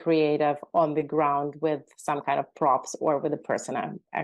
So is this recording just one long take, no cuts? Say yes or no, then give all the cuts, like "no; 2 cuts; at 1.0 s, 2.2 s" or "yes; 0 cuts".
yes; 0 cuts